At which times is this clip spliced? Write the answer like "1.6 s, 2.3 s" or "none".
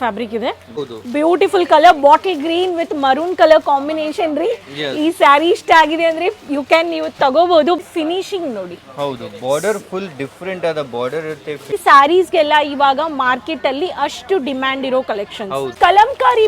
0.8 s, 7.8 s, 11.8 s, 15.7 s